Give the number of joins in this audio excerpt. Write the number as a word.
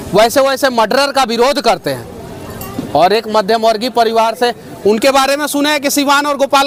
zero